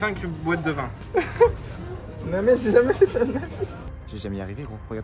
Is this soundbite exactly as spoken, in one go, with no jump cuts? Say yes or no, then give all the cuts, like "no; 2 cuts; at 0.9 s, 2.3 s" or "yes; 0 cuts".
no; 2 cuts; at 1.0 s, 3.8 s